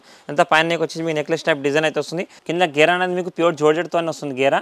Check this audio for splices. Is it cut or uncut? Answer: cut